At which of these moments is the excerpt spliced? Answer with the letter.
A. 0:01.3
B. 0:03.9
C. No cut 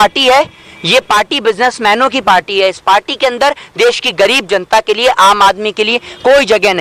C